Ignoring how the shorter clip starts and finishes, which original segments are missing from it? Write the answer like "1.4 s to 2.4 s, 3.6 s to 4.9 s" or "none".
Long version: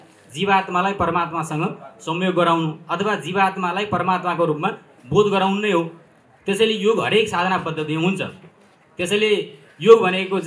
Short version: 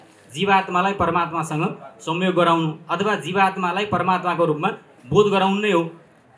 none